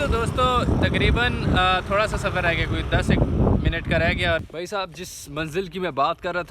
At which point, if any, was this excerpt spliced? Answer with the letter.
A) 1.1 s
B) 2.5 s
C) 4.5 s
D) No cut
C